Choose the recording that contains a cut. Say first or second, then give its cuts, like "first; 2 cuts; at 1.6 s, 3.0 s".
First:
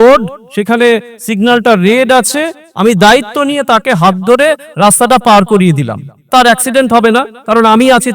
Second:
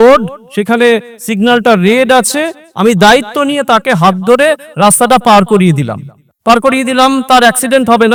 first; 1 cut; at 6.2 s